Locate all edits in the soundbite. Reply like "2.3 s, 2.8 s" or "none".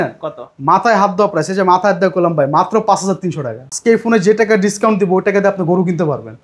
3.7 s